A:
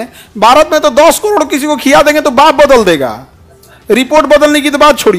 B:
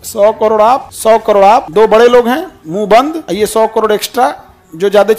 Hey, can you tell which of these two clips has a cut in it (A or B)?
B